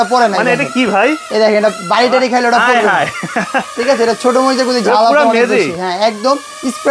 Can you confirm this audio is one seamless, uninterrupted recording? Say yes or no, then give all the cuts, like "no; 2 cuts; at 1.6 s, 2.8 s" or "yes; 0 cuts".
yes; 0 cuts